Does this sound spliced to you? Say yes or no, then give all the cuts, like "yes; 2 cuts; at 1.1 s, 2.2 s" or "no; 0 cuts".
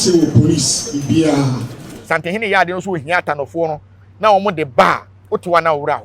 yes; 1 cut; at 1.9 s